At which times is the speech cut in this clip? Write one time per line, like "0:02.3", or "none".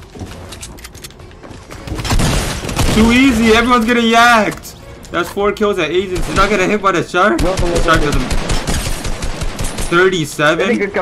0:06.3